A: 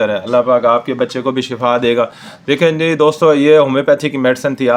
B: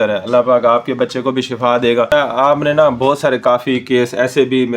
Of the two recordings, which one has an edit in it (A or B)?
B